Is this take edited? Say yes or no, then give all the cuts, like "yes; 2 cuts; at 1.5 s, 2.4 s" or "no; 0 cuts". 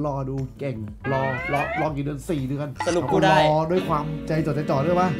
no; 0 cuts